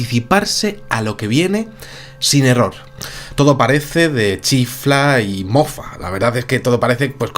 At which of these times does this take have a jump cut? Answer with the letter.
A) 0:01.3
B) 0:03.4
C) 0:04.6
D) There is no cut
C